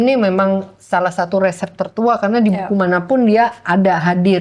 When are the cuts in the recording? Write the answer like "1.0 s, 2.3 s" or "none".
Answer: none

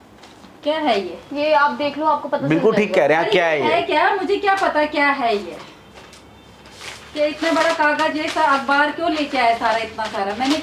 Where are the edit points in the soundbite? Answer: none

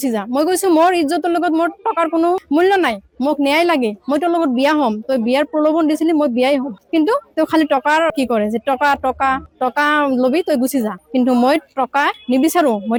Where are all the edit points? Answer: none

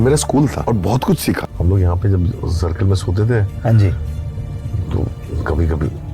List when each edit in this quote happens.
1.5 s

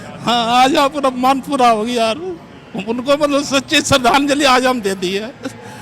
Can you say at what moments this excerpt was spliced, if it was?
none

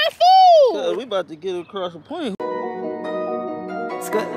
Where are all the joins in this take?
2.3 s

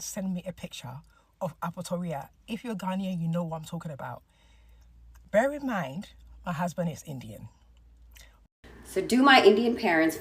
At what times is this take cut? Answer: 8.8 s

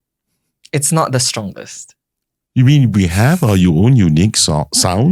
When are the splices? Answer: none

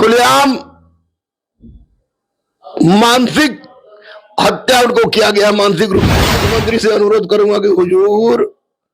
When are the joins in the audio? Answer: 6.2 s

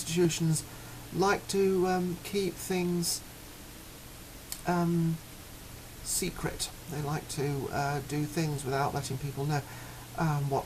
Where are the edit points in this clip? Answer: none

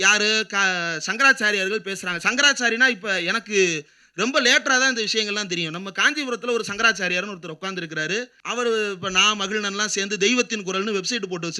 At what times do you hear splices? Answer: 8.4 s

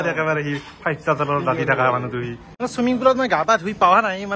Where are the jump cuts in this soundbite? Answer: 2.4 s

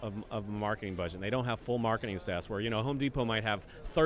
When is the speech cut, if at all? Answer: none

